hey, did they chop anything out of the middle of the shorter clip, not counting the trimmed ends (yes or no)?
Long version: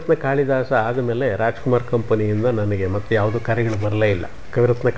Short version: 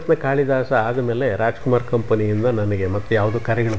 no